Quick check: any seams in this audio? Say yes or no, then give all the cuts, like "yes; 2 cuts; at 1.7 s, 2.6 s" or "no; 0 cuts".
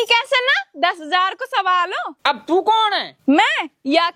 no; 0 cuts